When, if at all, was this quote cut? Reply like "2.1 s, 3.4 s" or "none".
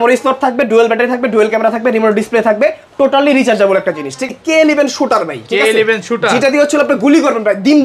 4.3 s